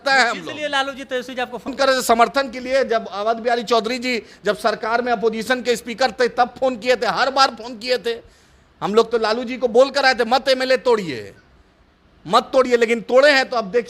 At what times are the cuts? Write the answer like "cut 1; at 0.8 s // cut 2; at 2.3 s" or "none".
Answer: none